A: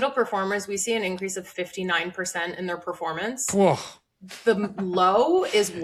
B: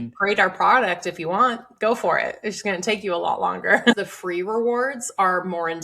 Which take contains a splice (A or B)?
B